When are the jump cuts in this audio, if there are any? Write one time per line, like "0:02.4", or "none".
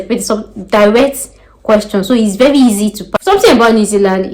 0:03.0